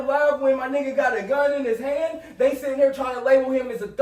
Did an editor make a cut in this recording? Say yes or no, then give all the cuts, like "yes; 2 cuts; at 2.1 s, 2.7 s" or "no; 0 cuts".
no; 0 cuts